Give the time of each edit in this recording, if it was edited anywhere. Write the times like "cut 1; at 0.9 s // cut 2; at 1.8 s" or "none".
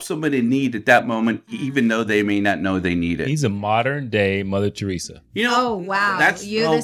none

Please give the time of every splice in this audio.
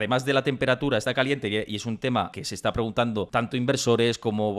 cut 1; at 1.0 s

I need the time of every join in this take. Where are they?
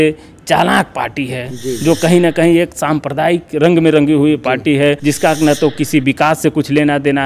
cut 1; at 5.0 s

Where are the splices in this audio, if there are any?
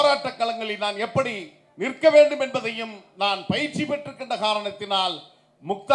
none

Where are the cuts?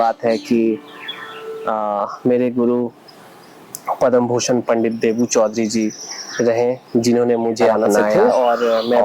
cut 1; at 8.1 s

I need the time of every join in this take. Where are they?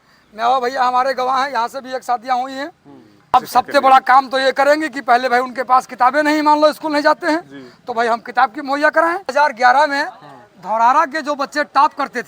cut 1; at 3.3 s // cut 2; at 9.3 s

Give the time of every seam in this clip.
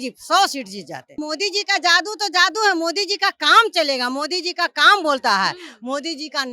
cut 1; at 1.3 s

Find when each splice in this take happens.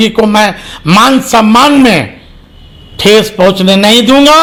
none

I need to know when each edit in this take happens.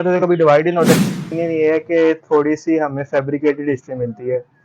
cut 1; at 1.3 s

